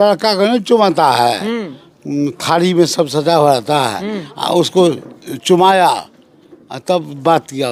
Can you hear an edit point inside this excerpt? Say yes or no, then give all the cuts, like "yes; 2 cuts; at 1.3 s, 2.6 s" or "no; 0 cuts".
no; 0 cuts